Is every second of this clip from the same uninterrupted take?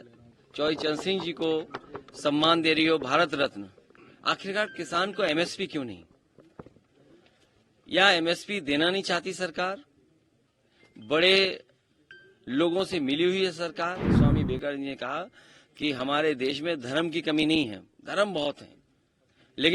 no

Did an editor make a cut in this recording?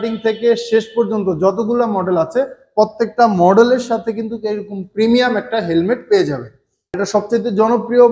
yes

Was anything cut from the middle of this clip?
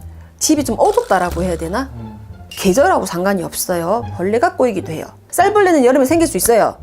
yes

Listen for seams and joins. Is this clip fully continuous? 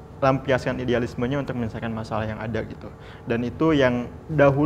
yes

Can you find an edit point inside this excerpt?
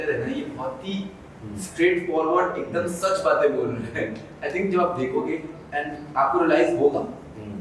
no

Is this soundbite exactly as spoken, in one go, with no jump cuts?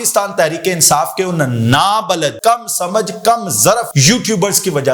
no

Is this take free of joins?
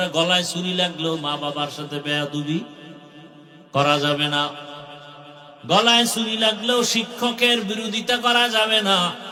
yes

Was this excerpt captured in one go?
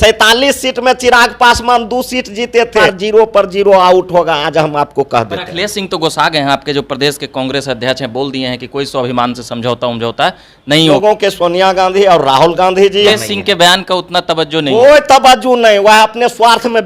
no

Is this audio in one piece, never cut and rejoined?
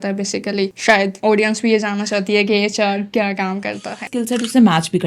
no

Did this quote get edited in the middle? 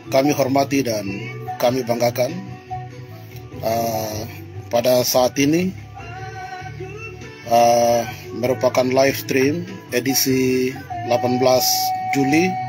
no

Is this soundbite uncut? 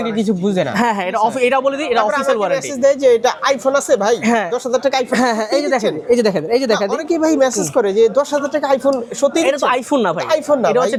yes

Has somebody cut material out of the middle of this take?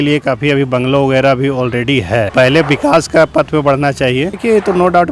yes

